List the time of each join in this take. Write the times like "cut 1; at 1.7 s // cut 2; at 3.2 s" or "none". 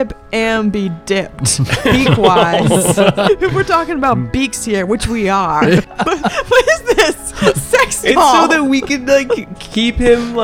cut 1; at 3.3 s // cut 2; at 5.8 s